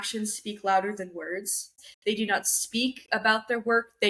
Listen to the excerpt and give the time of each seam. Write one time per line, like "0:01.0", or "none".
0:01.7